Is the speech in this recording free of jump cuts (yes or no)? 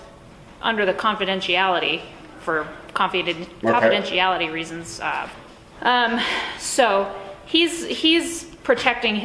no